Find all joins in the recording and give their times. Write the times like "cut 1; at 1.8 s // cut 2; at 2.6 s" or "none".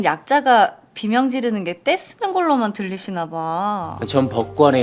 cut 1; at 3.9 s